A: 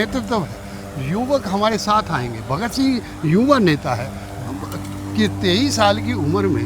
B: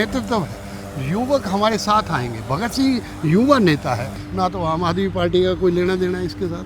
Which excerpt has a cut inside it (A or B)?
B